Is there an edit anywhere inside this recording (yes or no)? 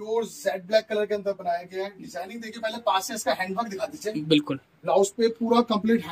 no